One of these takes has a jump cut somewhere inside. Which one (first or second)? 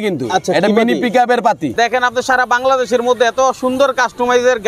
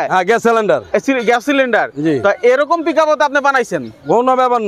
first